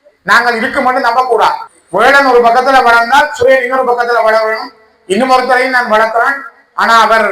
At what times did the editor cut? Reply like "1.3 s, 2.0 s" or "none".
1.7 s